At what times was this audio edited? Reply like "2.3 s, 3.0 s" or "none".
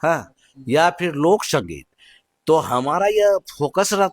none